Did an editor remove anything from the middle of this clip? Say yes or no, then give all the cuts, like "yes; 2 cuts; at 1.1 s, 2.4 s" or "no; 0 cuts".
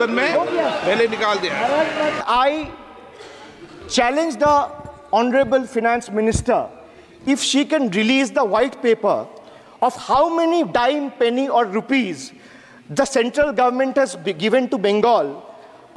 yes; 1 cut; at 2.2 s